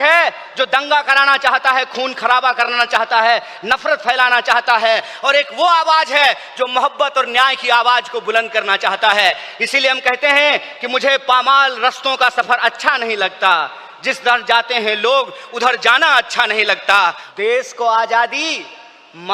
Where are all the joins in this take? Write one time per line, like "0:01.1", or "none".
0:17.2